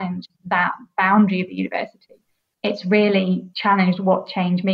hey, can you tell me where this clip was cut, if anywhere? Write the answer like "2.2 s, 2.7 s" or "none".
2.5 s, 3.5 s